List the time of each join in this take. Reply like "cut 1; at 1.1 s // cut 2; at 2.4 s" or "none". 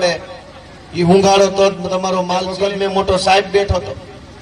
cut 1; at 2.5 s